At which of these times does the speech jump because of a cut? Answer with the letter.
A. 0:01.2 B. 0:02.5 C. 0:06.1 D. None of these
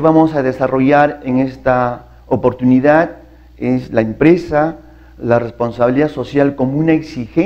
A